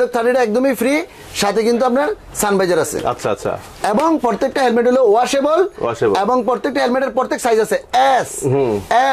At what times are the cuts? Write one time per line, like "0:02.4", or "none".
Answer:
none